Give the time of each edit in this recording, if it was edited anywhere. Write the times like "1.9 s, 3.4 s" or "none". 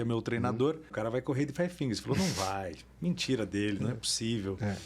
0.9 s